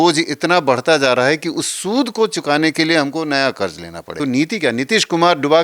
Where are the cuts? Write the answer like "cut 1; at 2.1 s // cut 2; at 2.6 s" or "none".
cut 1; at 4.2 s